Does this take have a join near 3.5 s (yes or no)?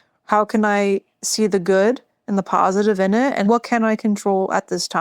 yes